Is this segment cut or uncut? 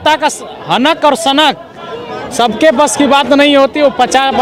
uncut